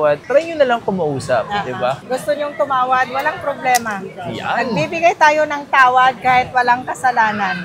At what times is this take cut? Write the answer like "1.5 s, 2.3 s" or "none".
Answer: 2.0 s

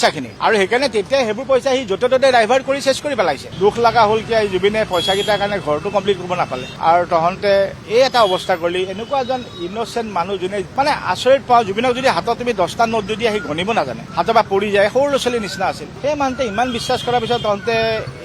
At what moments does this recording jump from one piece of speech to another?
3.5 s, 10.7 s

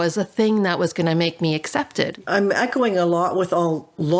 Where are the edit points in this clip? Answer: 2.1 s

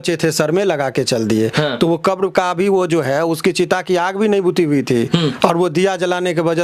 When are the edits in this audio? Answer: none

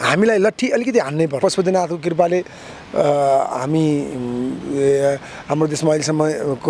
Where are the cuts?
1.4 s

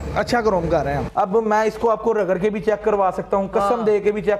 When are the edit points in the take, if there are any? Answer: 1.0 s

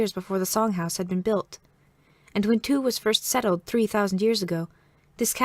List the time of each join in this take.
2.8 s

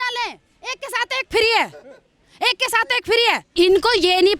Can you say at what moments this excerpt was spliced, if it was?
3.5 s

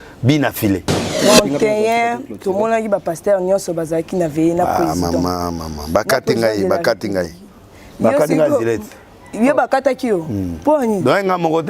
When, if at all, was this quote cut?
1.2 s

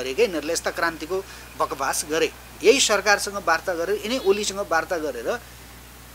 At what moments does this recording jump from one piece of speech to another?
2.5 s

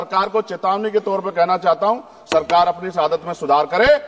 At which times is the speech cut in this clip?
none

